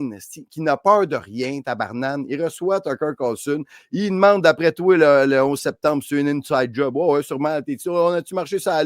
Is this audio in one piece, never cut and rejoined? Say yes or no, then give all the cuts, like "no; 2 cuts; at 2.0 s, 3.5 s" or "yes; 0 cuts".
no; 1 cut; at 1.0 s